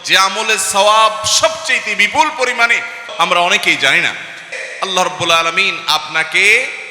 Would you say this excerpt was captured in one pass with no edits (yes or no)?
no